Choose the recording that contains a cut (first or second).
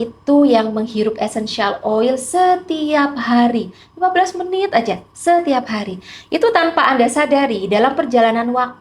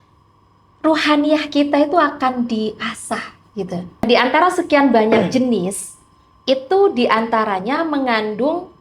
second